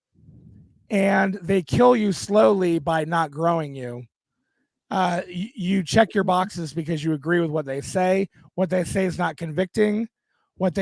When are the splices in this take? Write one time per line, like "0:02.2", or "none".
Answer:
none